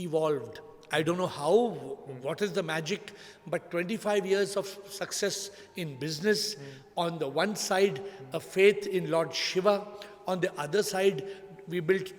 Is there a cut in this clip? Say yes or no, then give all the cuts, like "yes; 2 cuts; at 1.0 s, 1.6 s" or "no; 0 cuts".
no; 0 cuts